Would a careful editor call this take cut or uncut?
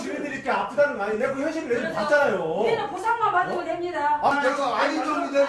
uncut